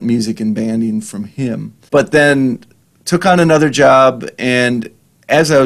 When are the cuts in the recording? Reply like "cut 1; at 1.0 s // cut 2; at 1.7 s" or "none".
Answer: cut 1; at 1.7 s